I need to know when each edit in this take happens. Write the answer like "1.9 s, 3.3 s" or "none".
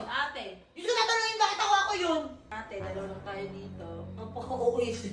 2.5 s

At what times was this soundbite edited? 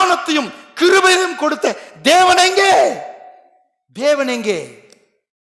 none

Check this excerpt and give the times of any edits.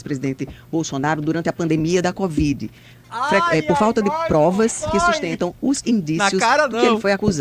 none

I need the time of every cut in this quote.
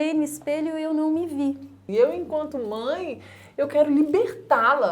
1.8 s

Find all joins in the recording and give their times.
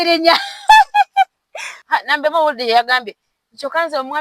1.7 s

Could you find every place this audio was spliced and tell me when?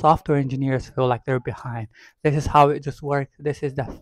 none

